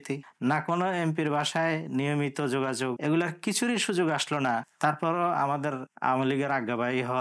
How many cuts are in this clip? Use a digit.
2